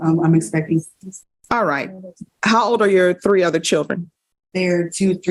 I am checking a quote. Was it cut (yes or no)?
no